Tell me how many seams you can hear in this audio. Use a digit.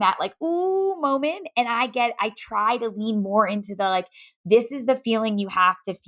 0